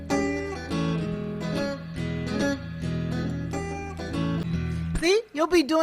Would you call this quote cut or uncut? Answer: cut